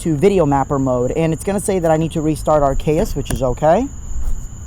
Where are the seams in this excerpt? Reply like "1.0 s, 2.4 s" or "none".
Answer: 3.3 s